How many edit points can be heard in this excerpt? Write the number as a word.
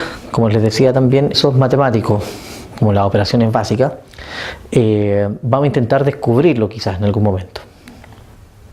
zero